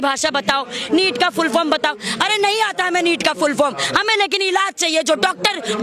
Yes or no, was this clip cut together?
no